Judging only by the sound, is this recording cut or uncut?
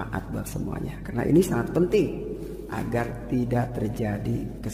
cut